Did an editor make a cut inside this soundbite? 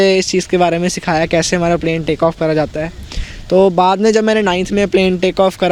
no; 0 cuts

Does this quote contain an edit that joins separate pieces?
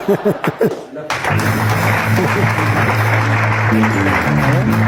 no; 0 cuts

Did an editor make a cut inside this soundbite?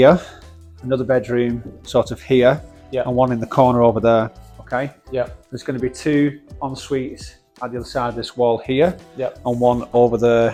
no; 0 cuts

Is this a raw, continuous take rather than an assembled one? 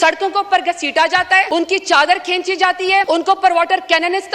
no; 2 cuts; at 1.5 s, 3.1 s

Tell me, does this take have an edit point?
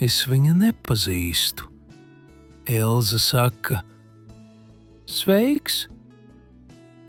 no; 0 cuts

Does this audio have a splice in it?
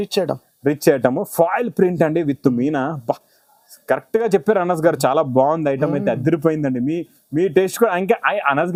no; 0 cuts

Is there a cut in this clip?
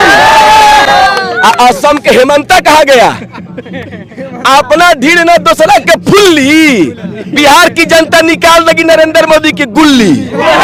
no; 0 cuts

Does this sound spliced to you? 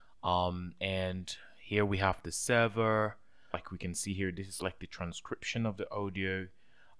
yes; 1 cut; at 3.7 s

